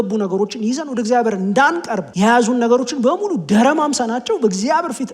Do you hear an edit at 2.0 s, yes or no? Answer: yes